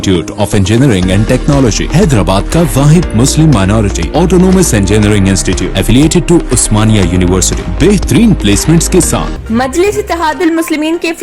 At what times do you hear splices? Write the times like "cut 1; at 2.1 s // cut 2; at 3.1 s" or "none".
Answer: cut 1; at 9.3 s